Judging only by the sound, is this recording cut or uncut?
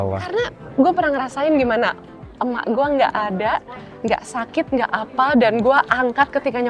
uncut